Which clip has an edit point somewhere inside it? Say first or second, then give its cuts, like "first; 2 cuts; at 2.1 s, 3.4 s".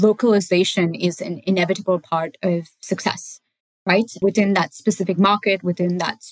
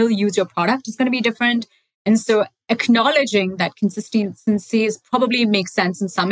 first; 1 cut; at 4.2 s